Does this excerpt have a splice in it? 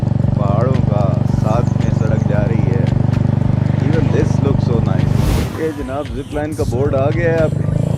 yes; 1 cut; at 5.2 s

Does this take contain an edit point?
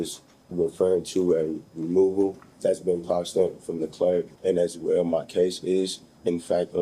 yes; 2 cuts; at 2.5 s, 4.3 s

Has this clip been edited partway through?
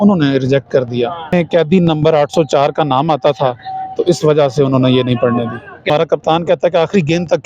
yes; 2 cuts; at 1.3 s, 5.9 s

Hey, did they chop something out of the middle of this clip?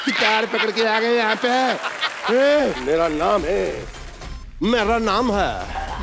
yes; 1 cut; at 2.8 s

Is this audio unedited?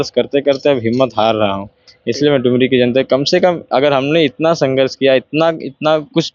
yes; 0 cuts

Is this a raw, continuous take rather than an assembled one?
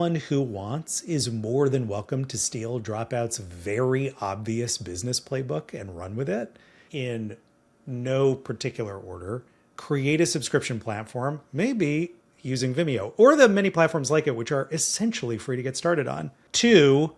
yes; 0 cuts

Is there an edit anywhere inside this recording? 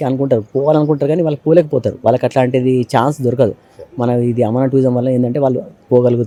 no; 0 cuts

